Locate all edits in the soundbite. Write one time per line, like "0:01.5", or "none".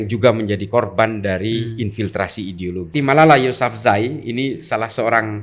0:02.9